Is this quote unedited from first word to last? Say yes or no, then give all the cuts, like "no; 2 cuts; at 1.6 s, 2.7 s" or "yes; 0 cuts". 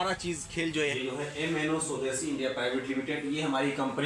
no; 1 cut; at 0.9 s